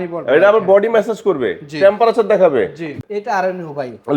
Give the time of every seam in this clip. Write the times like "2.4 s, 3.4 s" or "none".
3.0 s